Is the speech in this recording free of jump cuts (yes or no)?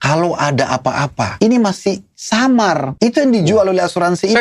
no